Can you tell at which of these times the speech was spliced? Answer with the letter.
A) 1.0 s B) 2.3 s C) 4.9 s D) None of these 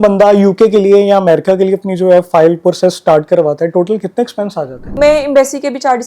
C